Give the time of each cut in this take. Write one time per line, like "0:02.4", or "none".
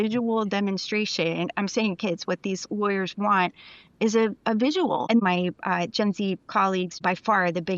0:05.2
0:06.9